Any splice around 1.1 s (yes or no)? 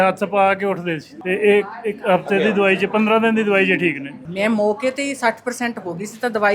yes